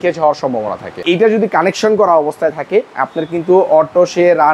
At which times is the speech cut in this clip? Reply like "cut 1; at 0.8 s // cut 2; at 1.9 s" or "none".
cut 1; at 1.0 s